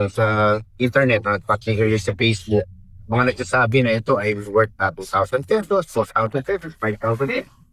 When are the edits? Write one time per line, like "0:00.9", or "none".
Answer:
none